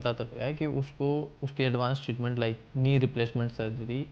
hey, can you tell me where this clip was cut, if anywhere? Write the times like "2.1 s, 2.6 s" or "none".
2.7 s